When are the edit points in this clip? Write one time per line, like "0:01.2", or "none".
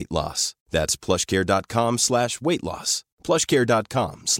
none